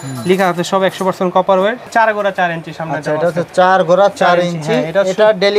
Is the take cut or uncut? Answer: cut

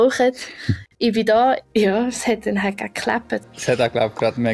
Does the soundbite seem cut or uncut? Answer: cut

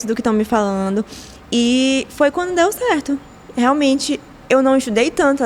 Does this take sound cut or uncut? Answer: uncut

